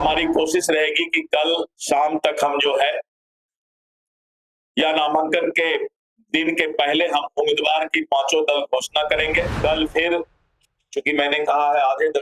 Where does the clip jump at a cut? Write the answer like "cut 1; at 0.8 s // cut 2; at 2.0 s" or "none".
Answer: cut 1; at 9.5 s